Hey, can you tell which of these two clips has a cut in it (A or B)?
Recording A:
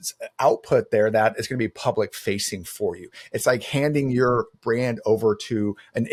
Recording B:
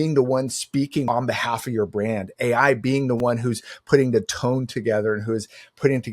B